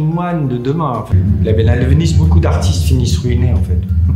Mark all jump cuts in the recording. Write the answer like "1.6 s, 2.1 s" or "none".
1.1 s